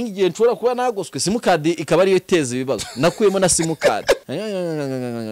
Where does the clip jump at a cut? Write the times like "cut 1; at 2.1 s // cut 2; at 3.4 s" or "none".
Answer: cut 1; at 4.2 s